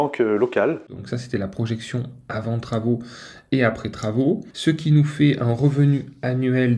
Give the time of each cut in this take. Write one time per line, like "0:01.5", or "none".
0:01.0
0:04.5

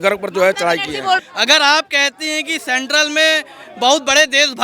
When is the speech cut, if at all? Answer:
0:01.2

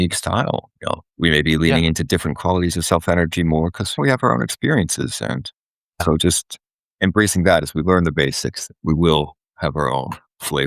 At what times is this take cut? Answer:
0:01.1
0:04.0
0:06.0

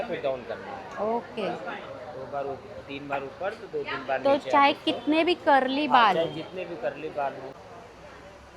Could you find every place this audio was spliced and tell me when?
0:07.6

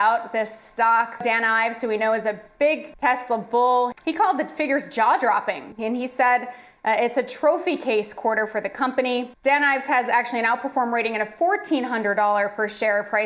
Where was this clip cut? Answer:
0:01.2
0:02.9
0:04.0
0:05.7
0:09.3

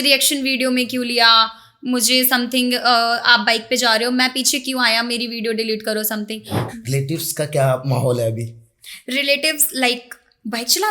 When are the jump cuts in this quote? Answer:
0:06.7

